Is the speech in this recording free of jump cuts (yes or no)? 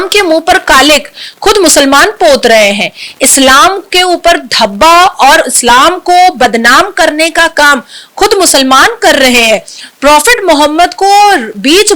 yes